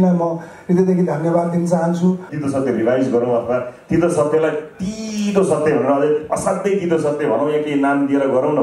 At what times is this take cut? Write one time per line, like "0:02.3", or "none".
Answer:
0:02.3